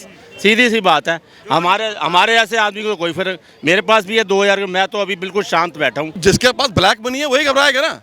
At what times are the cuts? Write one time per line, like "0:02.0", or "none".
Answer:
0:06.2

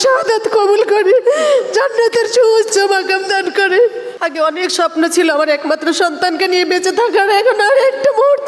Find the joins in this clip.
0:04.1

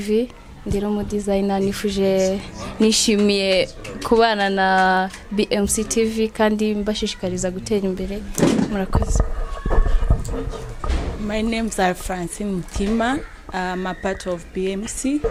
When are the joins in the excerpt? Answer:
none

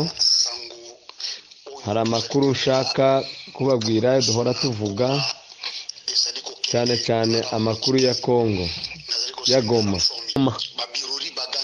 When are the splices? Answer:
0:10.4

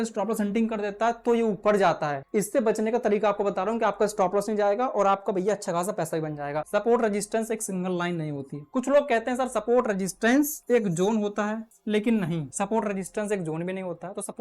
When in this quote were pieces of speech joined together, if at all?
0:02.2
0:06.7
0:10.6
0:11.7
0:12.5

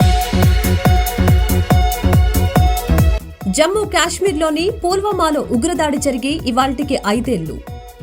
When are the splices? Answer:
0:02.9

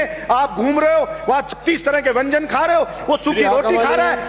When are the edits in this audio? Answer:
none

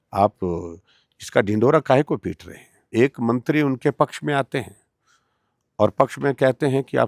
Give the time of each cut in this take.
0:02.8

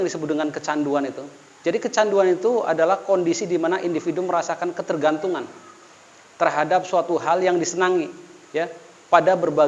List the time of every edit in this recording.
none

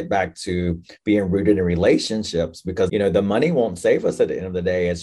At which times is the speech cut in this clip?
0:02.9

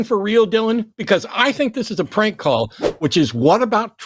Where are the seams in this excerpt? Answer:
0:02.8

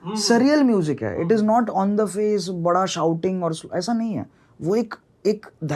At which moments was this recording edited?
none

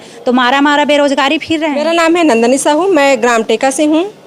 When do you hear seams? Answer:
0:01.8

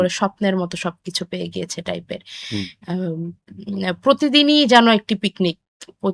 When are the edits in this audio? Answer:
none

